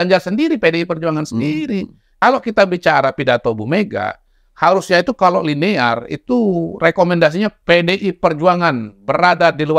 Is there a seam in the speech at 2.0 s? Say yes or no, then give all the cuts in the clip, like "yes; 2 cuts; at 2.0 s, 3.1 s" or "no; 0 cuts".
yes; 1 cut; at 2.0 s